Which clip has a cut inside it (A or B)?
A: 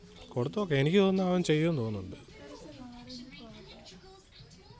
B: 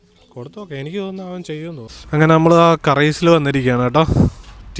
B